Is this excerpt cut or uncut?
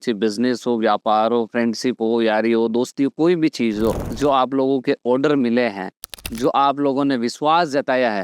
cut